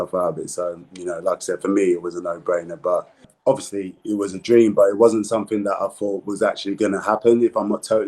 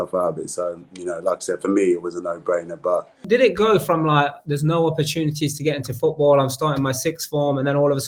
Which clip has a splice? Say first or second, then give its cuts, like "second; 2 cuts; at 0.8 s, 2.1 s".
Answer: first; 1 cut; at 3.1 s